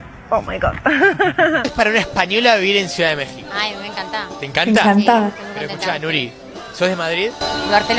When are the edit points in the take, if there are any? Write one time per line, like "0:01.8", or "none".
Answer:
0:01.7